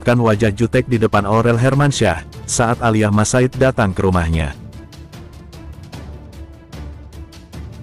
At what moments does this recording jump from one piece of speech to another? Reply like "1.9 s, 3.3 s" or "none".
5.1 s